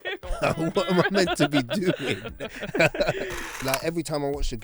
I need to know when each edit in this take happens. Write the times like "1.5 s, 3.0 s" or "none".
3.6 s

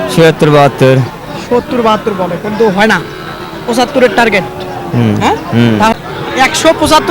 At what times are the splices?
5.9 s

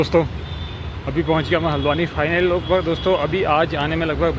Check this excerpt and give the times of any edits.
none

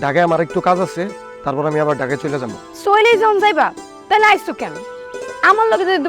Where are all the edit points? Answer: none

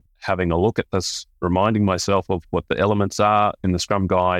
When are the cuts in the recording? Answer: none

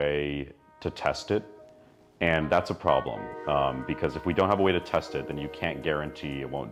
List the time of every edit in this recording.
none

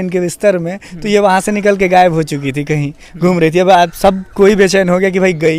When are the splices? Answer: none

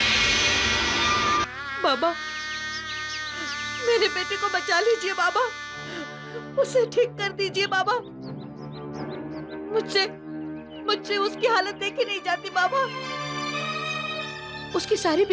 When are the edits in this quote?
1.5 s

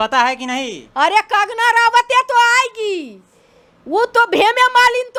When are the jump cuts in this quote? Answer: none

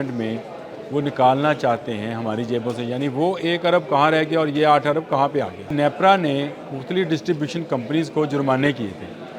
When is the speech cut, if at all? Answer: 5.7 s

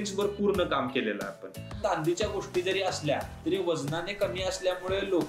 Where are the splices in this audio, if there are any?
1.8 s

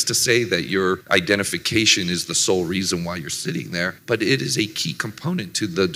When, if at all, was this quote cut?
1.0 s, 4.0 s

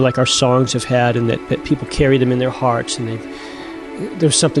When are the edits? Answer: none

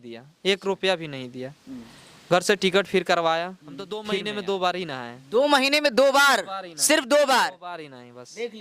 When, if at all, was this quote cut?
4.0 s

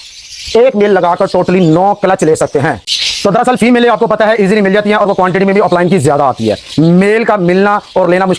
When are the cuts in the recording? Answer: none

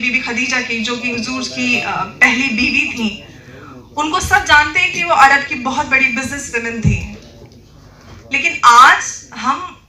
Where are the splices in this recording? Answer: none

